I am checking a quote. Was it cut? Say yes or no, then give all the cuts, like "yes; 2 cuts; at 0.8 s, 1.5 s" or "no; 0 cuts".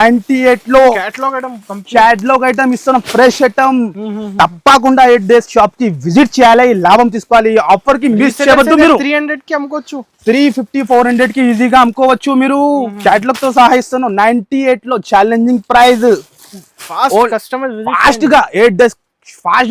no; 0 cuts